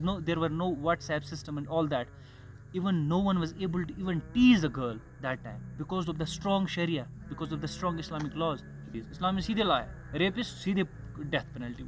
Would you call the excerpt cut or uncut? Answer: cut